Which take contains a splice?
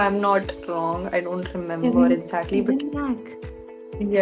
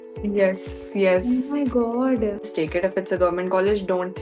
second; 1 cut; at 2.4 s

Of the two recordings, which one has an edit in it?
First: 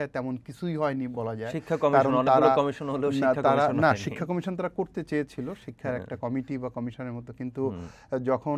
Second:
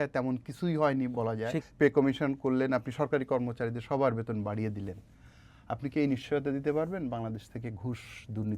second; 1 cut; at 1.6 s

